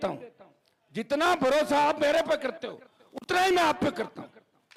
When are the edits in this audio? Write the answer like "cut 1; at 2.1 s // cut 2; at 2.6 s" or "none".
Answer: none